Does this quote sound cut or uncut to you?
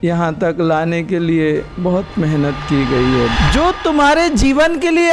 cut